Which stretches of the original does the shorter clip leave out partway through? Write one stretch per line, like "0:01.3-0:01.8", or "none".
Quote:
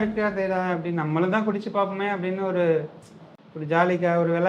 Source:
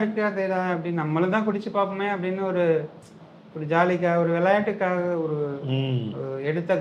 none